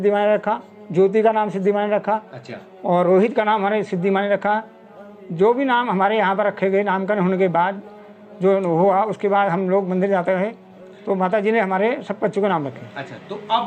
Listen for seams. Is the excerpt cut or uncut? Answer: uncut